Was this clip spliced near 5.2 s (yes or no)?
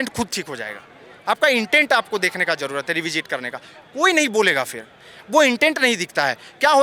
no